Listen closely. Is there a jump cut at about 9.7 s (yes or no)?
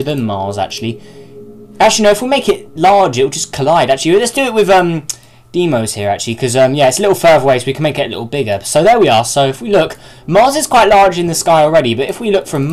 no